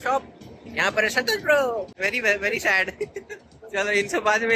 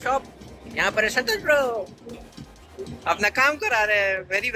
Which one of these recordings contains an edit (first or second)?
first